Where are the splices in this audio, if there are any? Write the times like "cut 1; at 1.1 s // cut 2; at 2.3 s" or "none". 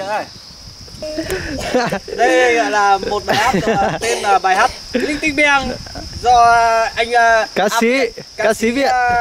cut 1; at 1.0 s